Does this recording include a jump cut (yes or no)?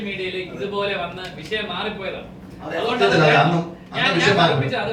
no